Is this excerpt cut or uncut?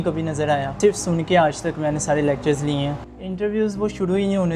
cut